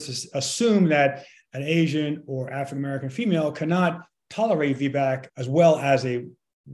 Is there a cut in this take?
no; 0 cuts

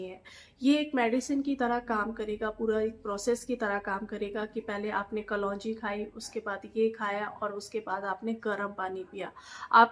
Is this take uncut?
yes; 0 cuts

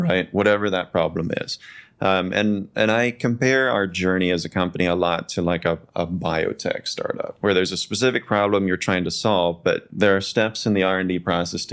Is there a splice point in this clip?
yes; 2 cuts; at 7.3 s, 9.9 s

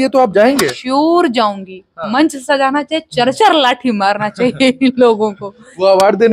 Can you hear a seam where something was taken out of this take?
yes; 1 cut; at 2.0 s

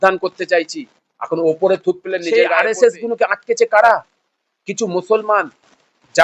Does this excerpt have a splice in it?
yes; 1 cut; at 2.2 s

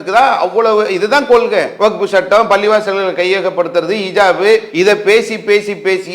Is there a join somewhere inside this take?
yes; 2 cuts; at 1.7 s, 4.7 s

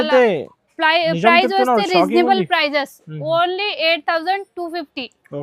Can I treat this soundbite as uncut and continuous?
yes; 0 cuts

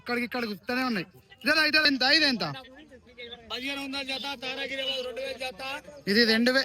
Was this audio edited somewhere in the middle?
yes; 1 cut; at 1.9 s

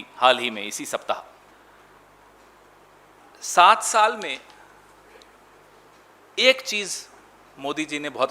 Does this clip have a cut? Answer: yes; 1 cut; at 1.5 s

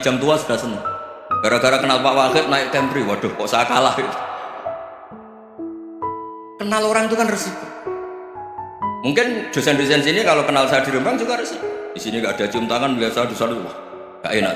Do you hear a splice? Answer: no; 0 cuts

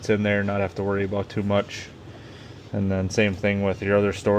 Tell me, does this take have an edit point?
no; 0 cuts

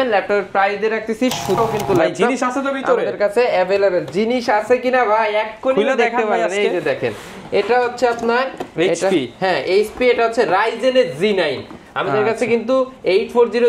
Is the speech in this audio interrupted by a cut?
yes; 1 cut; at 1.6 s

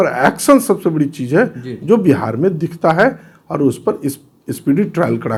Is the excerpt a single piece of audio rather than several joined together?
yes; 0 cuts

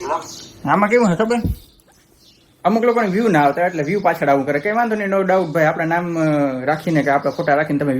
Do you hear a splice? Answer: no; 0 cuts

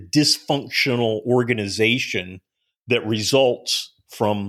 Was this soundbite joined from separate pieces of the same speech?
no; 0 cuts

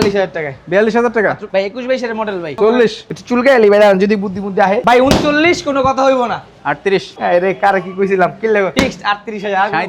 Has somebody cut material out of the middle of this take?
yes; 5 cuts; at 1.4 s, 2.5 s, 4.8 s, 7.1 s, 8.7 s

